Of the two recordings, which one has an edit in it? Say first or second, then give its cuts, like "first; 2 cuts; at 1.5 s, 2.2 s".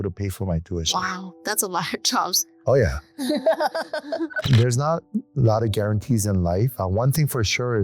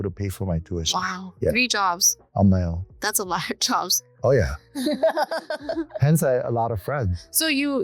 first; 2 cuts; at 1.3 s, 4.4 s